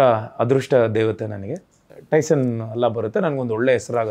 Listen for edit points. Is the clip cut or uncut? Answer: cut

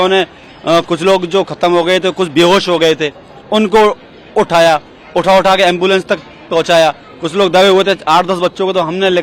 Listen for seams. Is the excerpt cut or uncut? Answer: uncut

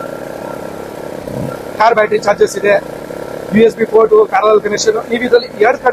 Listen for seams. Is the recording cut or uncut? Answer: uncut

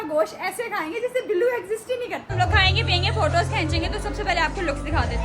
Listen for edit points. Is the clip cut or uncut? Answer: cut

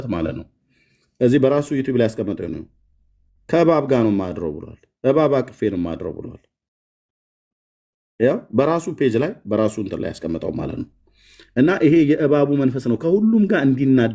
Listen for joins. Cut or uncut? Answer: uncut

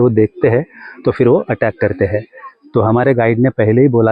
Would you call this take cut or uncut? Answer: uncut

